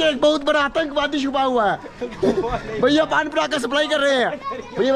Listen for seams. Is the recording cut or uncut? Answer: uncut